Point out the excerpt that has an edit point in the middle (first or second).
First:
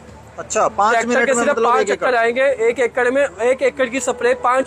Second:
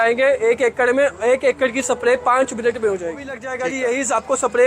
second